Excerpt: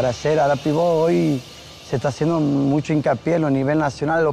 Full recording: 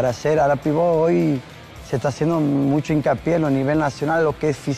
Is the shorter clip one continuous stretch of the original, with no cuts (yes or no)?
yes